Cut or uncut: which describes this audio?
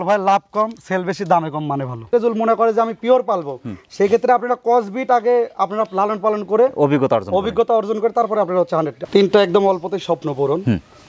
cut